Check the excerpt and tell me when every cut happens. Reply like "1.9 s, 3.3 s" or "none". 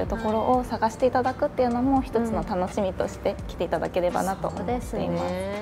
none

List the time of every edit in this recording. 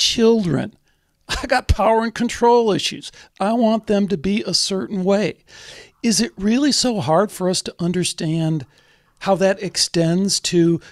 none

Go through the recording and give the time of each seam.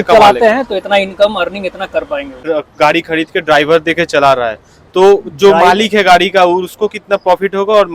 2.4 s

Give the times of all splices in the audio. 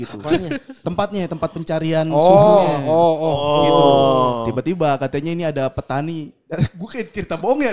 none

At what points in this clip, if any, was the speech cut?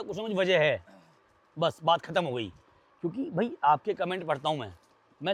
none

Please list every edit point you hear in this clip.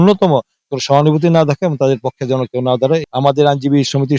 3.0 s

